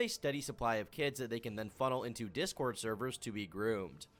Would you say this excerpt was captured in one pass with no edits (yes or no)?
yes